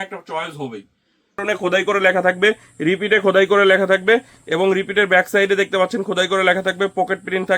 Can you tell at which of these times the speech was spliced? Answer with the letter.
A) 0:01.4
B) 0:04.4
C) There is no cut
A